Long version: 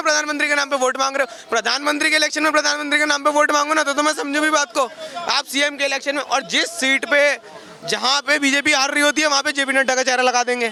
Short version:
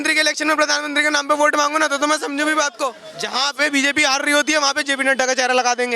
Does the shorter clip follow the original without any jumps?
no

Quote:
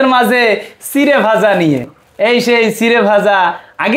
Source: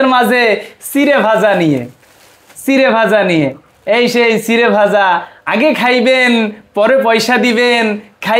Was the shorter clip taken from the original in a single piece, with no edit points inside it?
no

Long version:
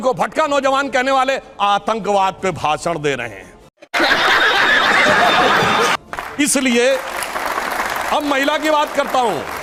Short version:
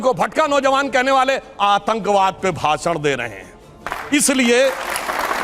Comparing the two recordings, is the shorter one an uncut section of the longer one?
no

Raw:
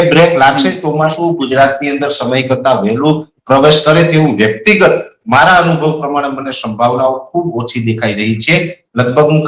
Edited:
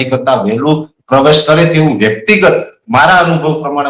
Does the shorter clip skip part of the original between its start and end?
no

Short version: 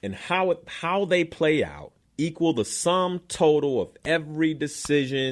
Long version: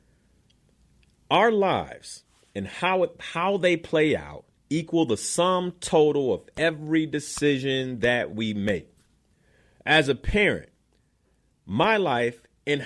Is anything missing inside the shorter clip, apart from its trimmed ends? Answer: no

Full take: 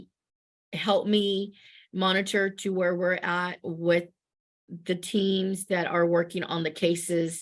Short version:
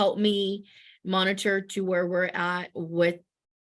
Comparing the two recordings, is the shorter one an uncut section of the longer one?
yes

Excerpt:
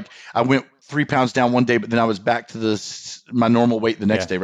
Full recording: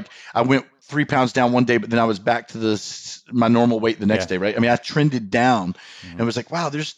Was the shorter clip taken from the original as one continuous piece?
yes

